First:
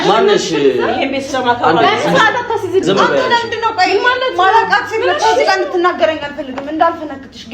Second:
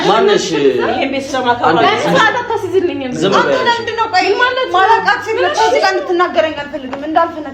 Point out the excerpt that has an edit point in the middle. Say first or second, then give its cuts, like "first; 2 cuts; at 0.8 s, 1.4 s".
first; 1 cut; at 2.8 s